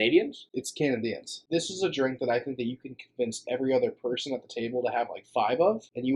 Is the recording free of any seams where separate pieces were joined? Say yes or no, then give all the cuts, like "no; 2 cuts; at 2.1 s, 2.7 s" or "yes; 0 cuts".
no; 1 cut; at 1.4 s